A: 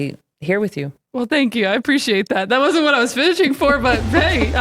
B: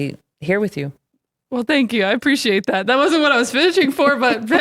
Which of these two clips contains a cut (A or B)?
A